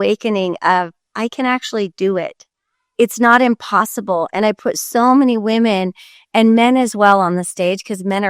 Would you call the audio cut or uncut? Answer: uncut